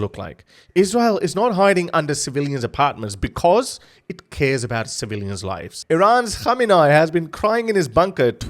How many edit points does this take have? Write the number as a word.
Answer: one